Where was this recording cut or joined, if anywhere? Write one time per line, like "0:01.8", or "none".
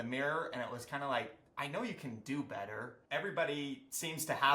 0:03.0